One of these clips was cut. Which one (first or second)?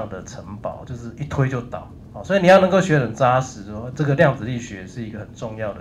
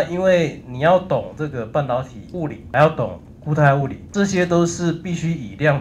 second